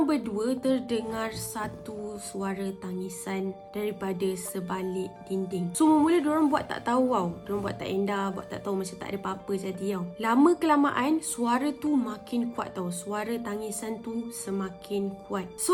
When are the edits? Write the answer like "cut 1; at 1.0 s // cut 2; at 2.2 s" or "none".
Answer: none